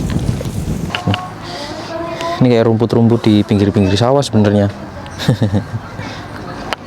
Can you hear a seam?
yes; 1 cut; at 0.9 s

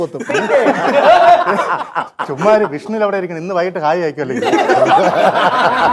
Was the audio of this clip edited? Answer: no; 0 cuts

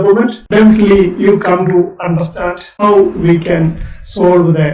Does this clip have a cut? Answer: no; 0 cuts

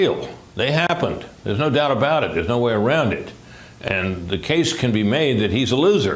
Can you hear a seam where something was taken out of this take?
yes; 1 cut; at 3.7 s

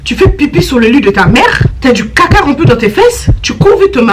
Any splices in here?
yes; 1 cut; at 1.7 s

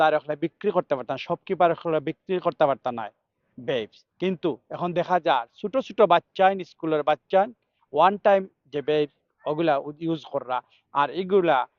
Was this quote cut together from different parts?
no; 0 cuts

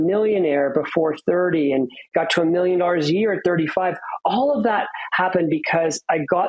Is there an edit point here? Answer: no; 0 cuts

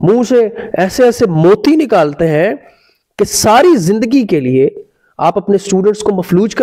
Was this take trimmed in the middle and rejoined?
no; 0 cuts

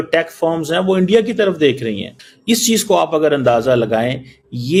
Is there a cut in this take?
no; 0 cuts

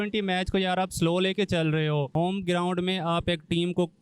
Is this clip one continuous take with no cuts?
no; 1 cut; at 2.1 s

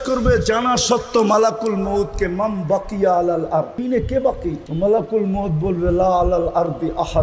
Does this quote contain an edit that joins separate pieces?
yes; 2 cuts; at 3.8 s, 4.7 s

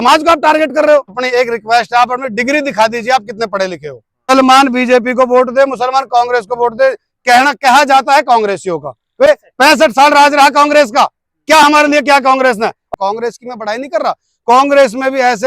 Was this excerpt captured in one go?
no; 4 cuts; at 1.2 s, 4.3 s, 9.3 s, 12.8 s

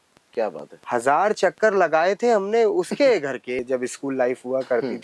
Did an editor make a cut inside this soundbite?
yes; 1 cut; at 3.6 s

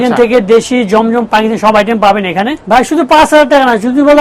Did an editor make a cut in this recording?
yes; 1 cut; at 2.6 s

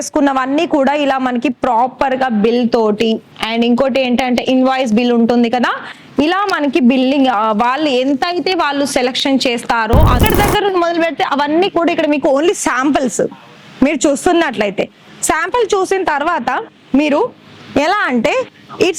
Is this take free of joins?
no; 1 cut; at 10.2 s

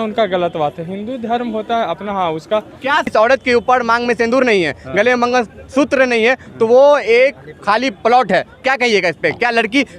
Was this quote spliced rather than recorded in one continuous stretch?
yes; 1 cut; at 3.1 s

